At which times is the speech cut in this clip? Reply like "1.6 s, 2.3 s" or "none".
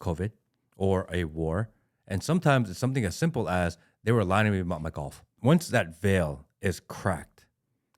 5.3 s